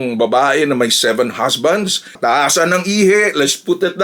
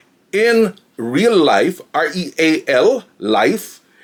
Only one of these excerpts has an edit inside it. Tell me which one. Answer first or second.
first